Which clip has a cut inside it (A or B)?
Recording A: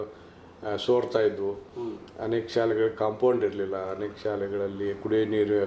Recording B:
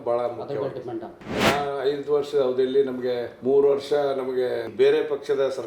B